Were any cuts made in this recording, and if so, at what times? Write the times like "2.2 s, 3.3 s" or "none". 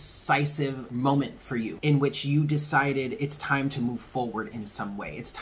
0.8 s, 1.7 s